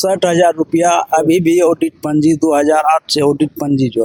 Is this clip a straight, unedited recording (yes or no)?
yes